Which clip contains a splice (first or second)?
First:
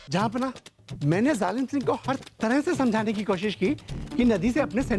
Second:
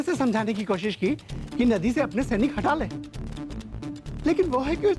second